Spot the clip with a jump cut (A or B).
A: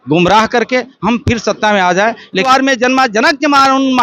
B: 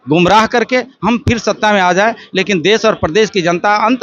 A